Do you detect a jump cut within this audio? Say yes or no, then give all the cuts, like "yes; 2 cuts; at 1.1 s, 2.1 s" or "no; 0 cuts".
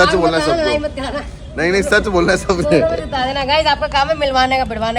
no; 0 cuts